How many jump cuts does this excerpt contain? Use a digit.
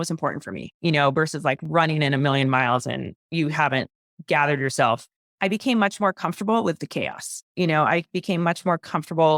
0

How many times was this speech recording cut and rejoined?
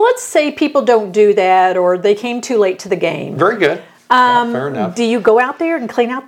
0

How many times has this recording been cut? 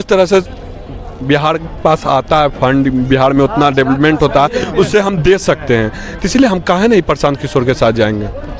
0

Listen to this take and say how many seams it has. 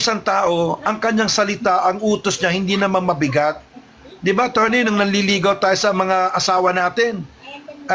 0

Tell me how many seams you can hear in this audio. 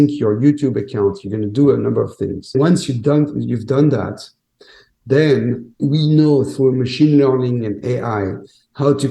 2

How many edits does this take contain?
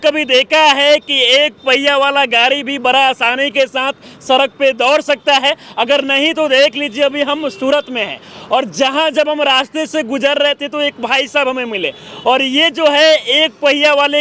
0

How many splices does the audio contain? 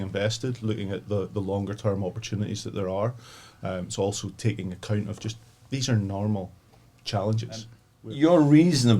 1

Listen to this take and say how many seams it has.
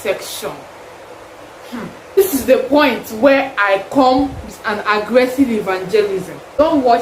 1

